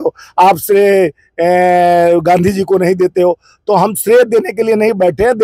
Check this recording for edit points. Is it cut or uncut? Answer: uncut